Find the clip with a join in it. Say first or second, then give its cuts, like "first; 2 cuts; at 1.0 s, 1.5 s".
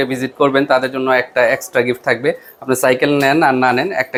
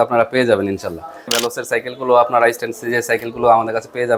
second; 1 cut; at 1.4 s